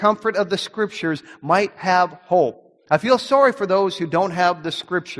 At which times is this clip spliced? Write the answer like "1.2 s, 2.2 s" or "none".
none